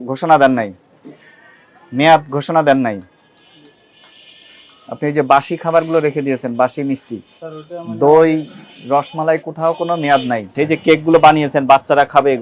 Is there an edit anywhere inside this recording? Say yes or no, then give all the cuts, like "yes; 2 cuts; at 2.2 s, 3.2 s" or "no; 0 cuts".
yes; 1 cut; at 10.5 s